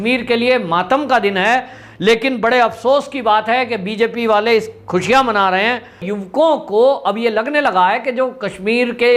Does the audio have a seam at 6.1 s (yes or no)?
yes